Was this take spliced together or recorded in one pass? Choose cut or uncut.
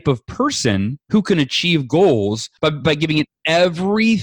cut